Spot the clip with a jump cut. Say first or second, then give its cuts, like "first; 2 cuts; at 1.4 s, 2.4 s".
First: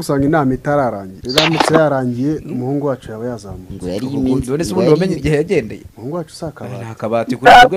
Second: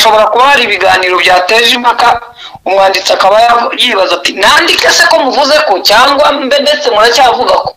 first; 2 cuts; at 1.1 s, 5.8 s